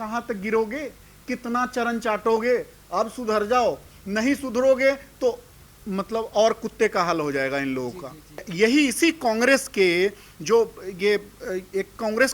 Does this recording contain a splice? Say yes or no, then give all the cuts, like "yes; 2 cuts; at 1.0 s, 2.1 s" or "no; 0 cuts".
yes; 1 cut; at 8.5 s